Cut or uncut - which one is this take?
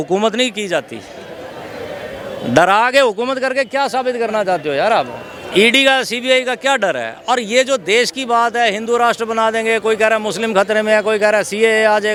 uncut